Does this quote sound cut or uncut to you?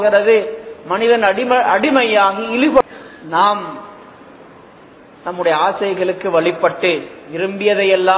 cut